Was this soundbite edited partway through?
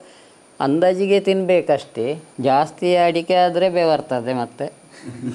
yes; 1 cut; at 2.3 s

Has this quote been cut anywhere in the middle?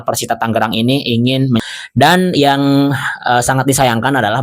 yes; 1 cut; at 1.6 s

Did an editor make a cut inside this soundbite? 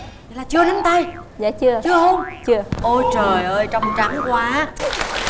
no; 0 cuts

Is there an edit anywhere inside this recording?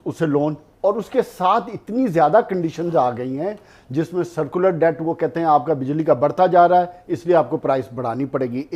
no; 0 cuts

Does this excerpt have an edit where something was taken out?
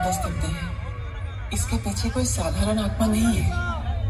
no; 0 cuts

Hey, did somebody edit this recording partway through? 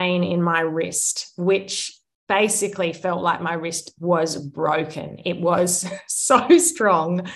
no; 0 cuts

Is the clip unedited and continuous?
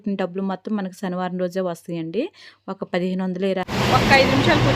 no; 1 cut; at 3.7 s

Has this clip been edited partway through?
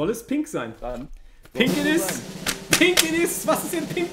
no; 0 cuts

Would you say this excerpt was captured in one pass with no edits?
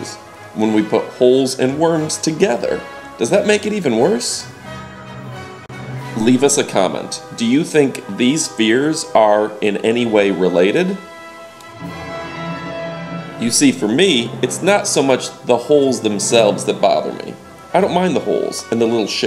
yes; 0 cuts

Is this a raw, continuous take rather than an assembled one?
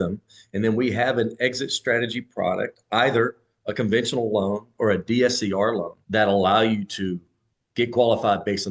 no; 1 cut; at 6.0 s

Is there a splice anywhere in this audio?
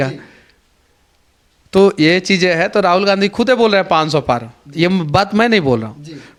no; 0 cuts

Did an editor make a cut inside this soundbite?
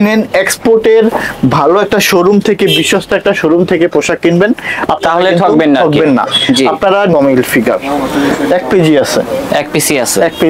yes; 1 cut; at 7.1 s

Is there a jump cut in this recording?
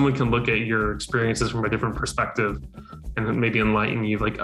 no; 0 cuts

